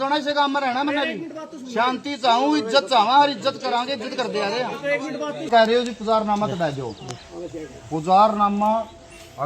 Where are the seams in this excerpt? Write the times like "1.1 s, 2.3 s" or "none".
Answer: 5.5 s